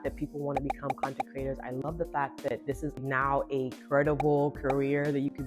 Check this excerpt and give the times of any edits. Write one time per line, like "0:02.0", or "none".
0:03.0